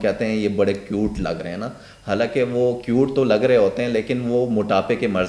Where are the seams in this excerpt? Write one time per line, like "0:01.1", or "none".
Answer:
none